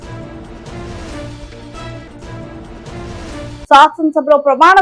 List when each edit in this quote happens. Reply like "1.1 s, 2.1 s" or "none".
3.6 s